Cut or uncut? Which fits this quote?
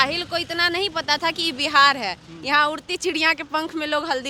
uncut